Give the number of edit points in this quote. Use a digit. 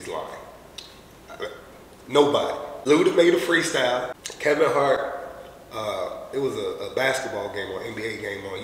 2